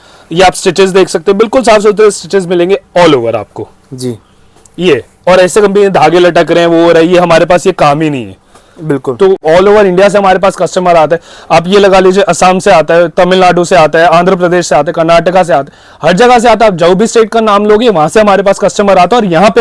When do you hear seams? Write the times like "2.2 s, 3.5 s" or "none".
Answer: 9.4 s